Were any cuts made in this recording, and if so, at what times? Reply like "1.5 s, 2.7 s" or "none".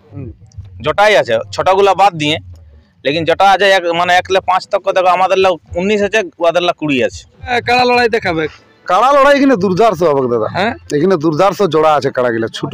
7.6 s